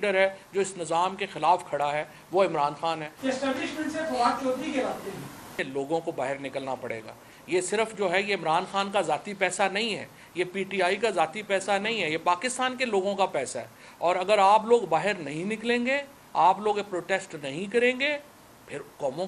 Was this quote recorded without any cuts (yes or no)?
no